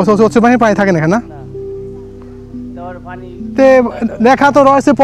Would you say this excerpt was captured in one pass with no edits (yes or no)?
yes